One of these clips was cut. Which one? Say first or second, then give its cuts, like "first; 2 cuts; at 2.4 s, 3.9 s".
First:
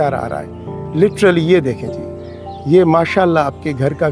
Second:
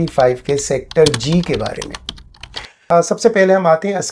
second; 1 cut; at 2.8 s